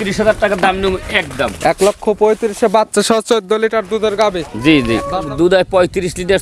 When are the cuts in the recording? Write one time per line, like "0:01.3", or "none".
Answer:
0:05.1